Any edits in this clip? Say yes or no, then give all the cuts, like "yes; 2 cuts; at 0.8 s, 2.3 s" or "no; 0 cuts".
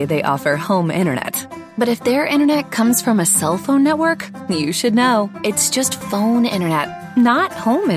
no; 0 cuts